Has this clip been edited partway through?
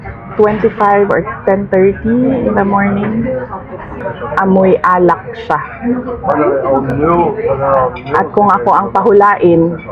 yes; 1 cut; at 4.1 s

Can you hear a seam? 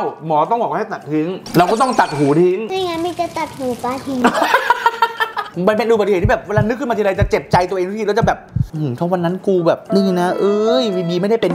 yes; 3 cuts; at 1.4 s, 4.2 s, 5.5 s

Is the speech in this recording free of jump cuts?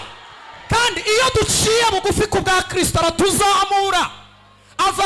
yes; 0 cuts

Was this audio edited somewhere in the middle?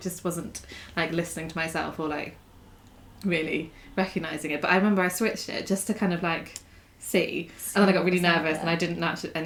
no; 0 cuts

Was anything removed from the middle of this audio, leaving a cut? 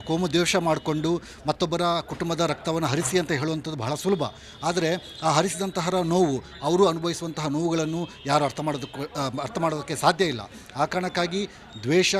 no; 0 cuts

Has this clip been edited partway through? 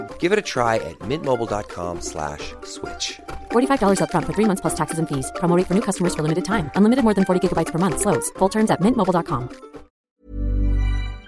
yes; 1 cut; at 10.0 s

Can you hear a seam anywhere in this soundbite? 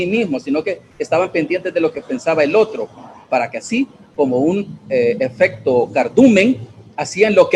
no; 0 cuts

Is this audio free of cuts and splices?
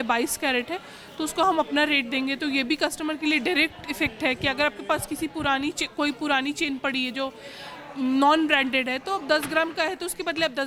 yes; 0 cuts

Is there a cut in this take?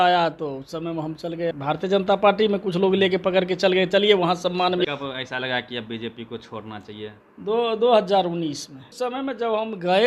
yes; 3 cuts; at 1.5 s, 4.9 s, 8.9 s

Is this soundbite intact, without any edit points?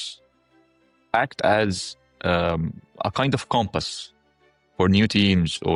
yes; 0 cuts

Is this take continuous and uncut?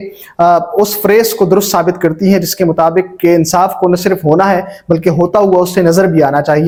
yes; 0 cuts

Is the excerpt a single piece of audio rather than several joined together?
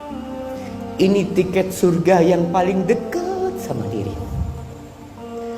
no; 1 cut; at 0.9 s

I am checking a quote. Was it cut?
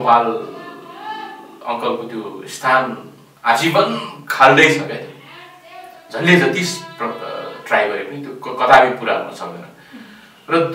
no; 0 cuts

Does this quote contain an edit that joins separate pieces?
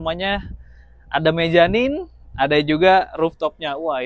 no; 0 cuts

